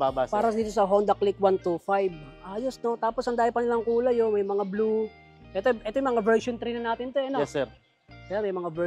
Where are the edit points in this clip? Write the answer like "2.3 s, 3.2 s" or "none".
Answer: none